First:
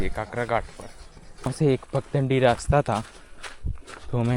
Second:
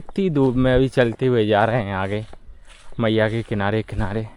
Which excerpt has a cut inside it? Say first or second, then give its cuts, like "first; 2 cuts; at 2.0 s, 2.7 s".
first; 1 cut; at 1.5 s